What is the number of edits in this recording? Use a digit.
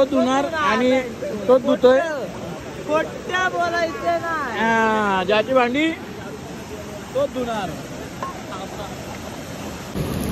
0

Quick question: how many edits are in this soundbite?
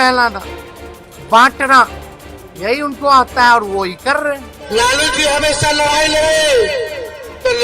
1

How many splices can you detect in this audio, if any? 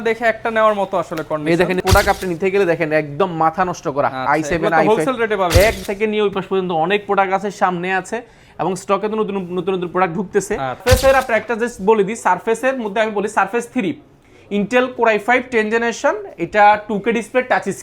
3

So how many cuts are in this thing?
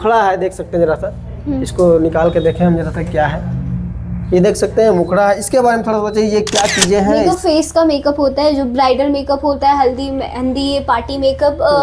1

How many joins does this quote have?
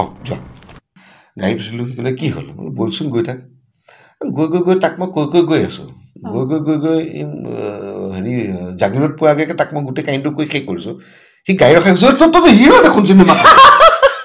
1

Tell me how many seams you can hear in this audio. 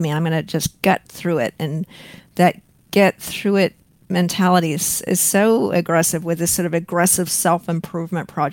0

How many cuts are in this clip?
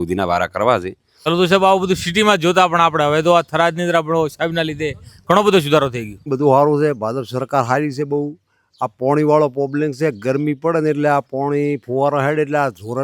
2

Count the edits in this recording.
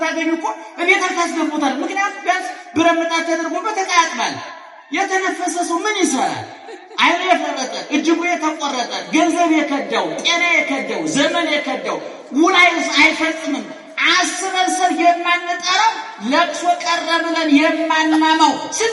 0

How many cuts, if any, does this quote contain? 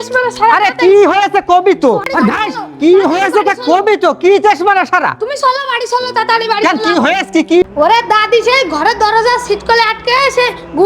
2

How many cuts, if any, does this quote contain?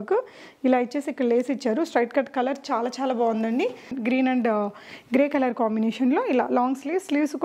1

